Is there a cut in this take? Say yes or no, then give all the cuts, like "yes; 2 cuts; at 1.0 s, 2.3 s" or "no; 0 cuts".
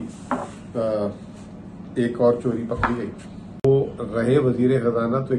yes; 1 cut; at 3.6 s